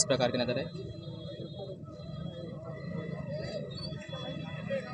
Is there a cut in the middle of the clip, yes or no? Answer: no